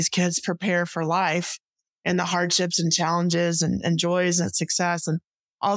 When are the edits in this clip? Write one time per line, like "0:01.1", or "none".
none